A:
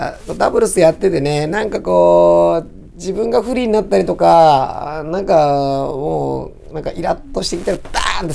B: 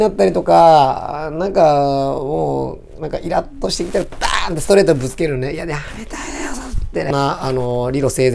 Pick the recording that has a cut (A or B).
B